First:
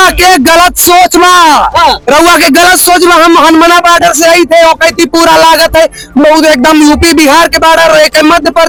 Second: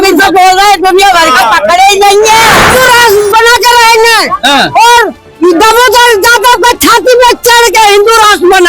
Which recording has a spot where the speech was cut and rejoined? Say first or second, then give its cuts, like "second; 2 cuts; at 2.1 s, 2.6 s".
second; 1 cut; at 2.7 s